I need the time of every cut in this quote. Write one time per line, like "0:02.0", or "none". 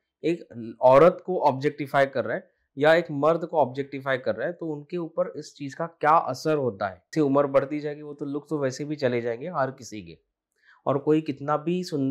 0:07.1